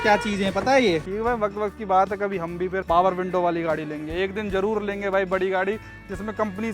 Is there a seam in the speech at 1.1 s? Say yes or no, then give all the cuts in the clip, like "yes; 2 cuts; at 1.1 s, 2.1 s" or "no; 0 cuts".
yes; 2 cuts; at 1.1 s, 2.8 s